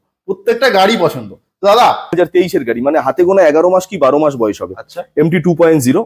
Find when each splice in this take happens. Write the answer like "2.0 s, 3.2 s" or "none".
2.1 s